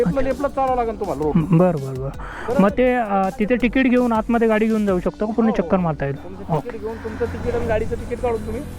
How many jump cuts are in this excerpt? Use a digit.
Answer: 0